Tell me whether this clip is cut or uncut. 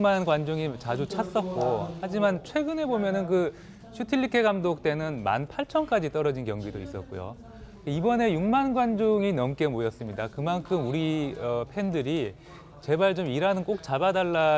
cut